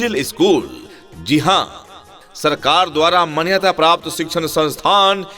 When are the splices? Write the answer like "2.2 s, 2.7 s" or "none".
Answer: none